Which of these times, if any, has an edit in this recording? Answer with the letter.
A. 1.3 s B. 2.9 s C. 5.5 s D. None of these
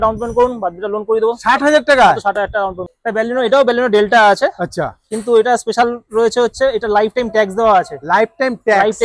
B